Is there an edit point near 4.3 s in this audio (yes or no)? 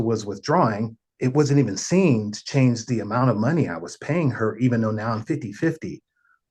no